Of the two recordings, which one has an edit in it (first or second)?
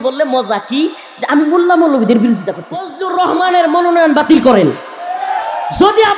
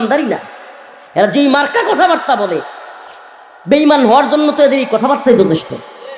first